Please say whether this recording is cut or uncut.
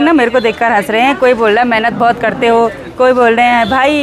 uncut